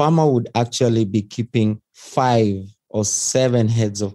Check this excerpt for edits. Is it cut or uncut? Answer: uncut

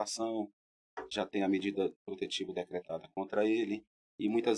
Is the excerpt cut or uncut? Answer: uncut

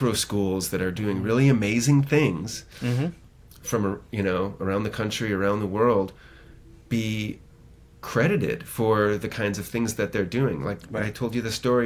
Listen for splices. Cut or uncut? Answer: cut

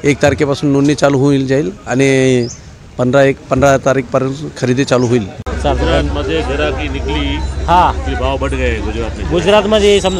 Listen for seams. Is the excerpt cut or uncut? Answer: cut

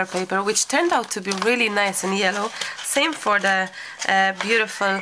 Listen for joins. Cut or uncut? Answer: uncut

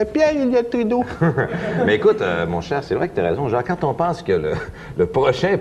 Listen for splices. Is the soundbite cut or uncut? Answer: cut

